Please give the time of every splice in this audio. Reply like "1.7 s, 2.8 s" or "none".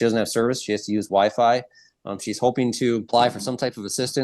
3.0 s